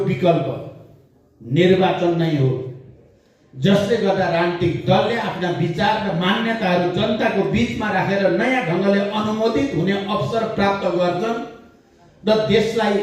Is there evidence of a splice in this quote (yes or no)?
no